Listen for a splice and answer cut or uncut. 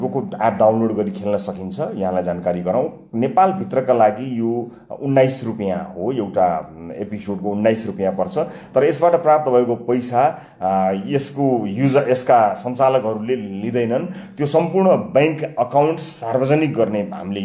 uncut